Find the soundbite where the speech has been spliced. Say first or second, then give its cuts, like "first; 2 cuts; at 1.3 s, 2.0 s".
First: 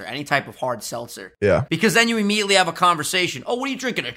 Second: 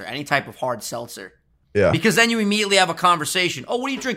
first; 1 cut; at 1.7 s